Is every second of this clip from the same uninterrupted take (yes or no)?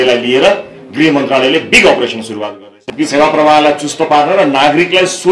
no